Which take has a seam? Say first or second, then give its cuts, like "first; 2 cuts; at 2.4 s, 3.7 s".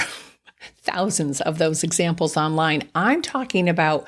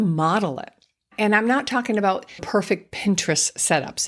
second; 2 cuts; at 1.0 s, 2.4 s